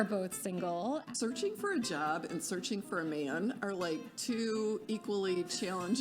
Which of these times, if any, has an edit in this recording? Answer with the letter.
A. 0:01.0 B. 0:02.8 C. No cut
A